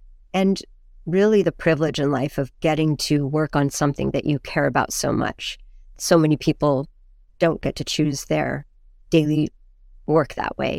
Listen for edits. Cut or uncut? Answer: uncut